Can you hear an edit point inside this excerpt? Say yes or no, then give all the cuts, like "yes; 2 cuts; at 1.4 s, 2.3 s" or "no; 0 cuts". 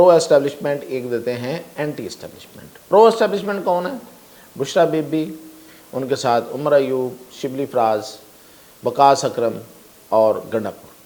no; 0 cuts